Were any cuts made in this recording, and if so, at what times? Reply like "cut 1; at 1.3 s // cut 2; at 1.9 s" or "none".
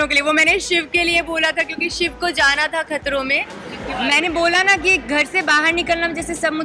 cut 1; at 3.8 s